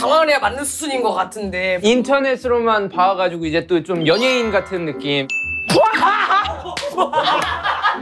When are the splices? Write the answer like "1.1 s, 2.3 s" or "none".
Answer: 1.8 s